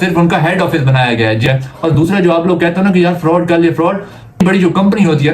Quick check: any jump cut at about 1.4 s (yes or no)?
yes